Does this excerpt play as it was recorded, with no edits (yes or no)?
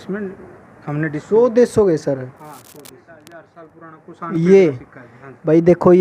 no